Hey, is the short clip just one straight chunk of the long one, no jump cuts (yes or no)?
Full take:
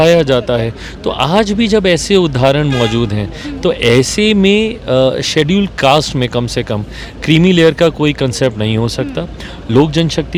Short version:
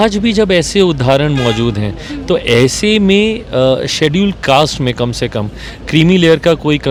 yes